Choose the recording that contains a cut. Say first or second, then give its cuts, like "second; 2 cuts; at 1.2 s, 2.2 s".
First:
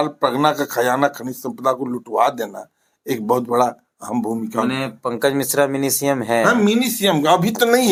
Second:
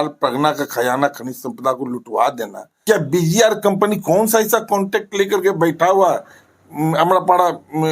second; 1 cut; at 2.8 s